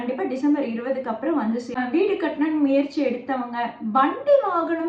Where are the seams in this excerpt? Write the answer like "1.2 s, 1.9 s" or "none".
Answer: 1.7 s